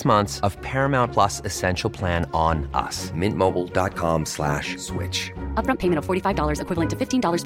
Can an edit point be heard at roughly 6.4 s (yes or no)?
no